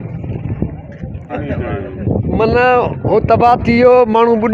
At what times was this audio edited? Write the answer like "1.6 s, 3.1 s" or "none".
1.3 s